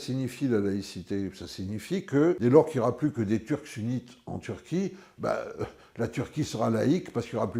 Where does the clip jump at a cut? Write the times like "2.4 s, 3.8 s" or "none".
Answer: none

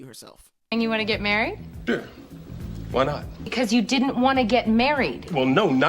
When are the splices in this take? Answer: 0.7 s, 3.5 s

